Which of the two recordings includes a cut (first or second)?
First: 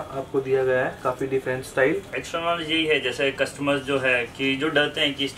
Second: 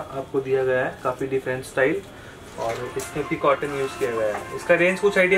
first